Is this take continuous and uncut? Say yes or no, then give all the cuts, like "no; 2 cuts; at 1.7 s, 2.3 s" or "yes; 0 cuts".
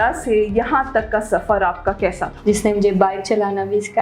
no; 1 cut; at 2.3 s